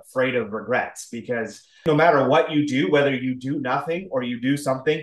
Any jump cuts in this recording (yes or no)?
yes